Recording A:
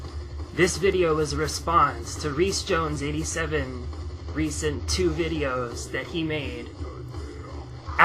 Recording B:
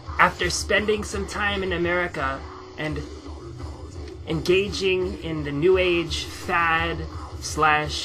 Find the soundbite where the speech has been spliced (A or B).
B